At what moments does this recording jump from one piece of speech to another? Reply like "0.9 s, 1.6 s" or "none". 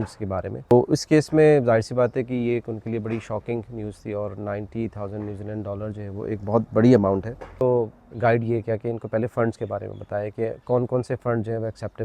0.7 s, 7.5 s